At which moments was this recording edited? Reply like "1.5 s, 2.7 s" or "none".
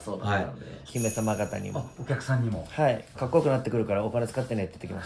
0.9 s, 3.3 s